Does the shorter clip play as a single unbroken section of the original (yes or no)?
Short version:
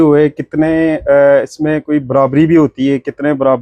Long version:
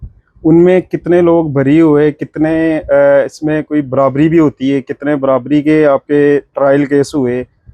yes